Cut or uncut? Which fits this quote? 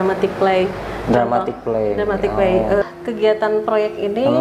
cut